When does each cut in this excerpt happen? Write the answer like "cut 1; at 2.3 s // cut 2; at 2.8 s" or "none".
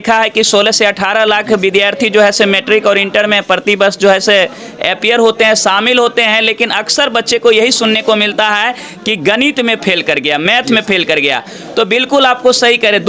none